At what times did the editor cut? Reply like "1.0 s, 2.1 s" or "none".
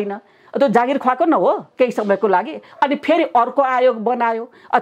none

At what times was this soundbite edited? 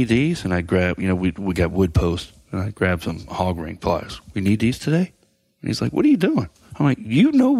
6.6 s

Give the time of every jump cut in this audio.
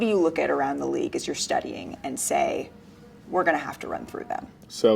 none

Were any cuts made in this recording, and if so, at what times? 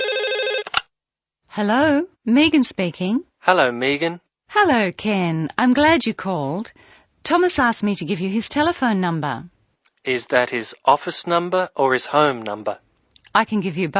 1.0 s

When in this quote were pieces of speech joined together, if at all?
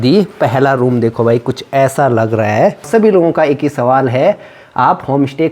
2.9 s

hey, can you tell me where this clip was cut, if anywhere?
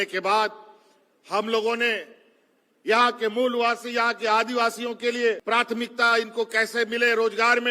5.4 s

